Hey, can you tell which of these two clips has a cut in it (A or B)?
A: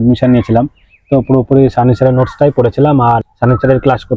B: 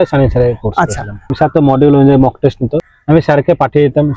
B